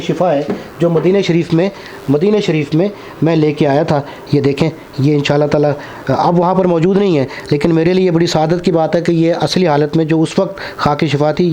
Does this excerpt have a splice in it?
no; 0 cuts

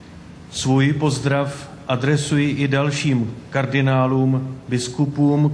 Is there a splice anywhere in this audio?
yes; 1 cut; at 1.0 s

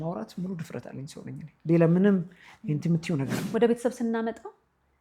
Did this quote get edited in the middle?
yes; 1 cut; at 3.4 s

